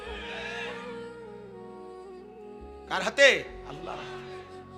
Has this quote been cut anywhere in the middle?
no; 0 cuts

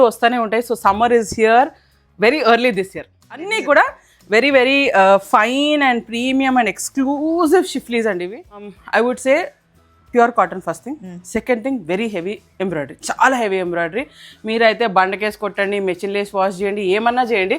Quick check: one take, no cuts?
no; 2 cuts; at 3.5 s, 8.8 s

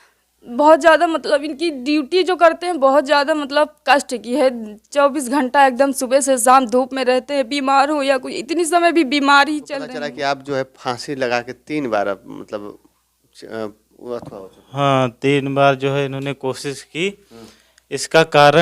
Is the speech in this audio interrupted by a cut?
yes; 1 cut; at 9.9 s

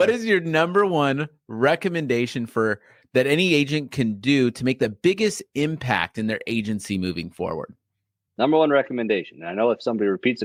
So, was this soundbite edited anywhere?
no; 0 cuts

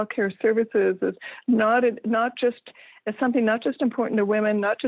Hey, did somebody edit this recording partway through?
no; 0 cuts

